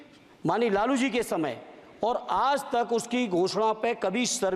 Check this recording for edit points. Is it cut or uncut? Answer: uncut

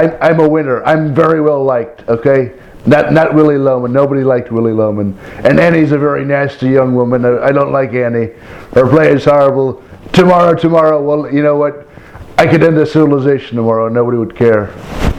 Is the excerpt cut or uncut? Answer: uncut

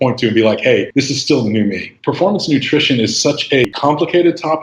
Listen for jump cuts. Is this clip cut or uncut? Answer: cut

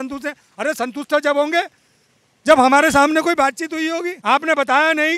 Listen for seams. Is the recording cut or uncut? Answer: cut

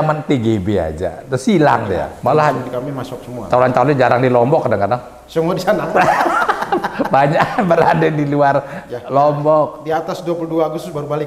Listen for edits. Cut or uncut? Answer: cut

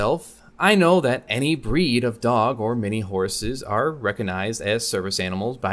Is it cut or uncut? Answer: uncut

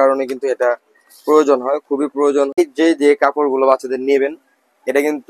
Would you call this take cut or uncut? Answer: cut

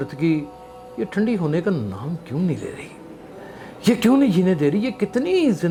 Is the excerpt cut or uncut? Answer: uncut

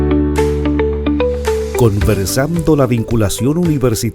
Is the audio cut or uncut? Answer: cut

